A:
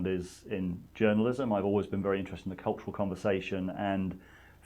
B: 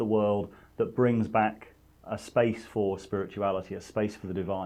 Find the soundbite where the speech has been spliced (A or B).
A